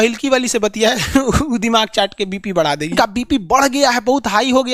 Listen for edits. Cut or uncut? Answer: cut